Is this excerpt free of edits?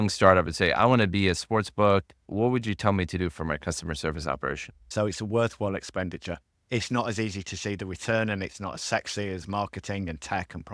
no; 2 cuts; at 2.2 s, 4.9 s

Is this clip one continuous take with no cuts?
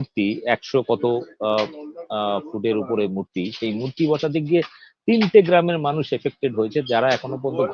yes; 0 cuts

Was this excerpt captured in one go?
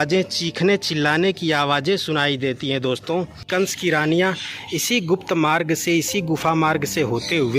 no; 1 cut; at 3.5 s

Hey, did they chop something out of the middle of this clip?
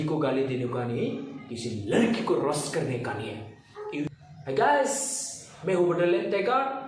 yes; 1 cut; at 4.1 s

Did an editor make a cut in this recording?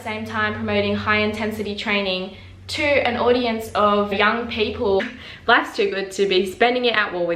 yes; 1 cut; at 5.0 s

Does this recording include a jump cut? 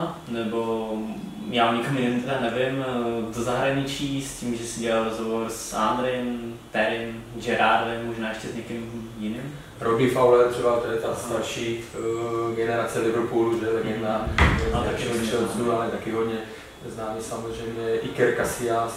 no; 0 cuts

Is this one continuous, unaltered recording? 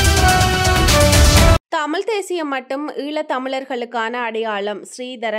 no; 1 cut; at 1.6 s

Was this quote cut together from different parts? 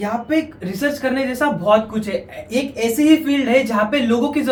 no; 0 cuts

